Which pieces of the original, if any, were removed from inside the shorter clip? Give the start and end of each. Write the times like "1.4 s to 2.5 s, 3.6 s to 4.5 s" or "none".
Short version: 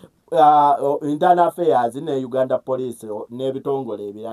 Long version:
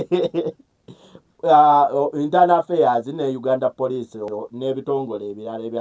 4.2 s to 4.3 s